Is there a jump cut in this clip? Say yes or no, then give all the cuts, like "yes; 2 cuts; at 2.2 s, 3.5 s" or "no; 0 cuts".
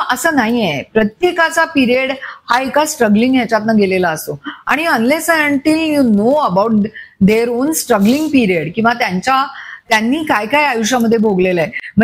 no; 0 cuts